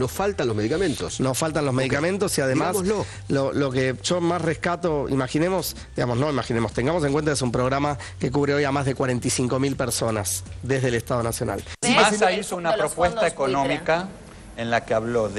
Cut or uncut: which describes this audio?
cut